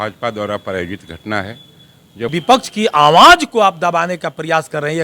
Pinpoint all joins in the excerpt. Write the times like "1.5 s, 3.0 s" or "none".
2.3 s